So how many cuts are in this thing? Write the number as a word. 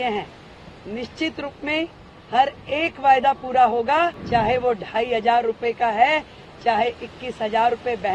one